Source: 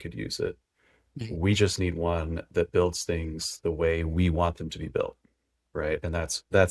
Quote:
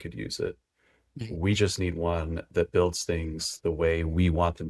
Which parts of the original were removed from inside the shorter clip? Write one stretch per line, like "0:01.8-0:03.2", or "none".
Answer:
none

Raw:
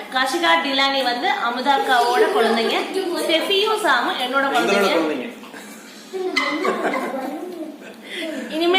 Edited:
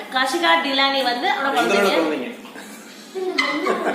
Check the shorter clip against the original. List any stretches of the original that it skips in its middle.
0:01.4-0:04.4

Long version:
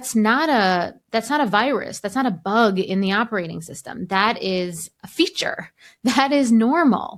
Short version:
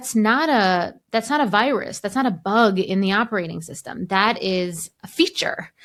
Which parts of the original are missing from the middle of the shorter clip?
none

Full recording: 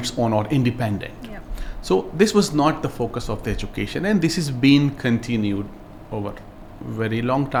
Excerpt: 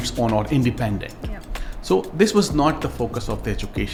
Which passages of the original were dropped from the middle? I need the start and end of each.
none

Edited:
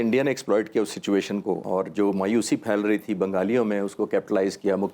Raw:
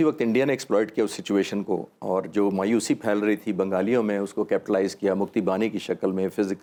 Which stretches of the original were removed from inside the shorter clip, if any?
0:01.9-0:02.0

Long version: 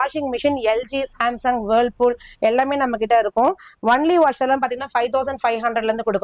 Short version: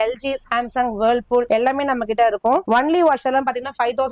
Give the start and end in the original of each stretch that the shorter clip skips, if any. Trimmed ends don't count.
0:02.1-0:02.4
0:03.6-0:03.8

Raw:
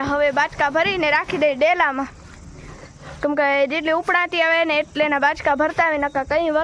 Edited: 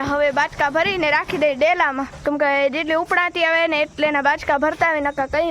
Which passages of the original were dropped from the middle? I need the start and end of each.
0:02.1-0:03.1

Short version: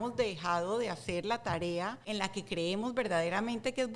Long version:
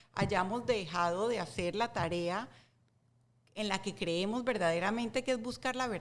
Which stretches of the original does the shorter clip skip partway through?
0:02.5-0:03.5

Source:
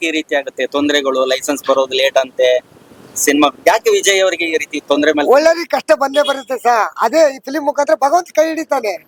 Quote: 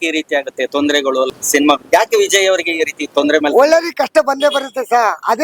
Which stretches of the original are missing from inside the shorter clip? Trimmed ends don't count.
0:01.3-0:03.0

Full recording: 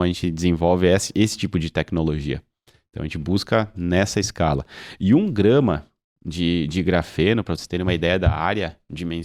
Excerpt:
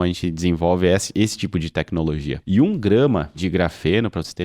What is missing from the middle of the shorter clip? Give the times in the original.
0:02.3-0:04.9
0:05.9-0:06.7

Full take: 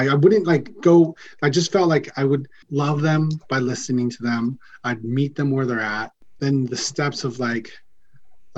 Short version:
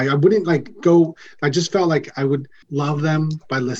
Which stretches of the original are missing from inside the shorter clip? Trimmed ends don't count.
none

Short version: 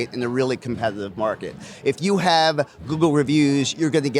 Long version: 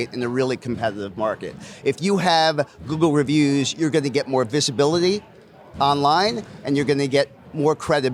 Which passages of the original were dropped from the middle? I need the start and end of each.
none

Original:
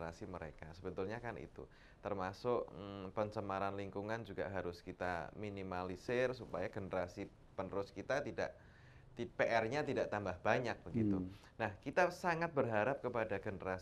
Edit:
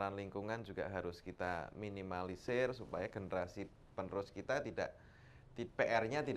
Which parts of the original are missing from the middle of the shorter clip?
none

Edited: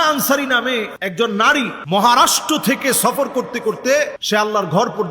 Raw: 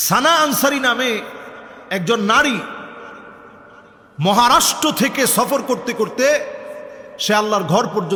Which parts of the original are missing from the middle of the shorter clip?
0:01.3-0:01.9
0:02.7-0:04.1
0:06.5-0:07.1

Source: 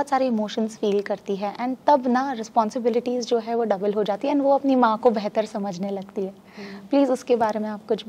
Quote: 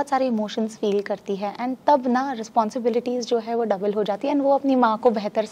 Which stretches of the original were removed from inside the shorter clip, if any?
none

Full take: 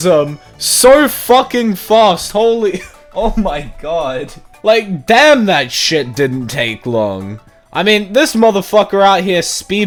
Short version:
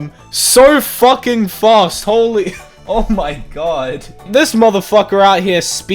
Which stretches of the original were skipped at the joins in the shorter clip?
0:04.5-0:08.1

